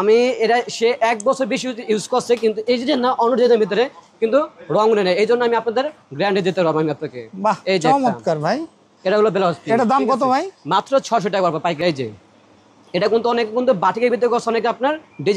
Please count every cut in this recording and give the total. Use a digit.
1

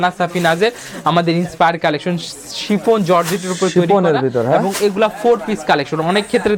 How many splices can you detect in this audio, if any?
0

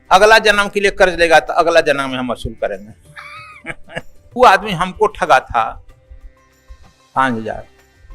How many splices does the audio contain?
1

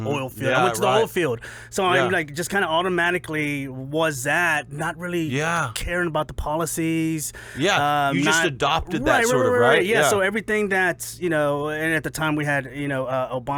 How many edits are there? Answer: 0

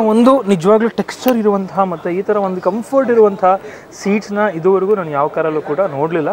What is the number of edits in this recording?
0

